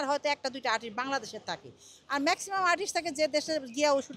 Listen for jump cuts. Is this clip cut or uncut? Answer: uncut